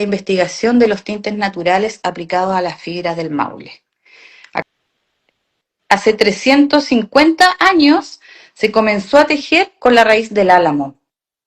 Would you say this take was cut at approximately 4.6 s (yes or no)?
yes